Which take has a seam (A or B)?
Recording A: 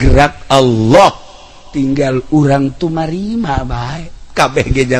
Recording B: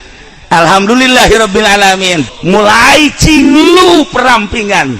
B